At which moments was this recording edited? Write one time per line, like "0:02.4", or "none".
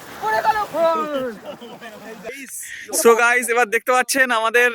0:02.2